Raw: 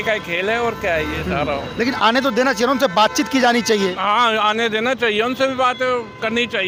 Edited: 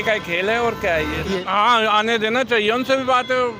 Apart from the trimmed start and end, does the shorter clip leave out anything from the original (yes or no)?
yes